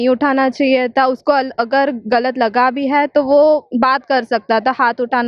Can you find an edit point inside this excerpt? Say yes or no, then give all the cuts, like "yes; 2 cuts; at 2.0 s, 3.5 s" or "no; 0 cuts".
no; 0 cuts